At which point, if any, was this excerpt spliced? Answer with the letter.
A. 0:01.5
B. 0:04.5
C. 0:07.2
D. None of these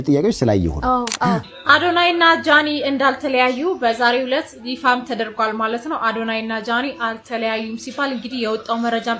A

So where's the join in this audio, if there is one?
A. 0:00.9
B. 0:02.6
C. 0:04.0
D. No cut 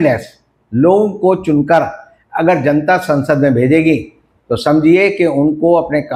D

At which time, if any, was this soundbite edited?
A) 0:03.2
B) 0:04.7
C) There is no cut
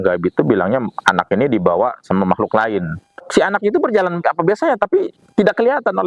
A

